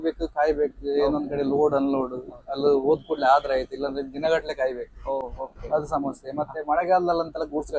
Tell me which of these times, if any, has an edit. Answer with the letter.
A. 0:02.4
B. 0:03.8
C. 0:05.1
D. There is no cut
D